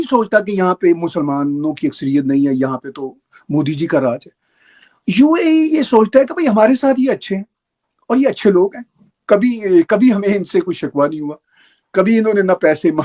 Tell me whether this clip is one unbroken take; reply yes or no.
yes